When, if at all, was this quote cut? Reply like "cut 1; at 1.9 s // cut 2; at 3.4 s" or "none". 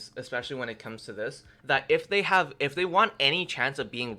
none